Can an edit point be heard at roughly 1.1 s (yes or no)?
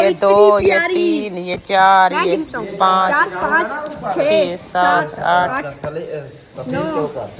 no